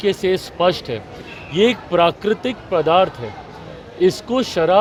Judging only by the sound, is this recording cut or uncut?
uncut